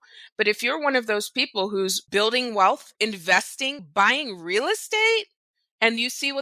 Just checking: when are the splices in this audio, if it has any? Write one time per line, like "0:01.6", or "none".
0:02.0
0:02.9